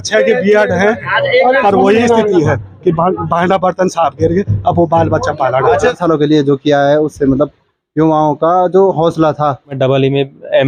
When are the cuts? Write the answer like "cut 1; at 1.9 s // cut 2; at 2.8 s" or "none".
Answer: cut 1; at 6.0 s // cut 2; at 9.8 s